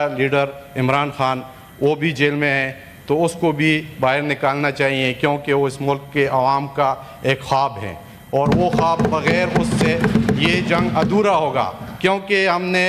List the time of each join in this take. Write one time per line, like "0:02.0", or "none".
none

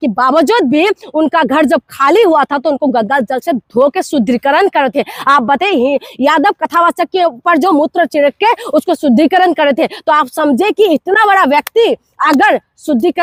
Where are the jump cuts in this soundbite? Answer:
none

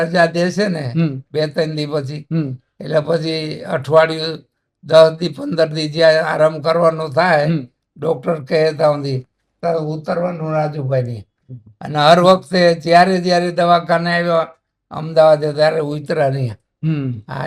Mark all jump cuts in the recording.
none

